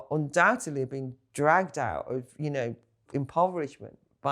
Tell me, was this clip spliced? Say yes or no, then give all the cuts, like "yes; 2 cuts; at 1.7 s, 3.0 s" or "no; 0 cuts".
yes; 1 cut; at 3.1 s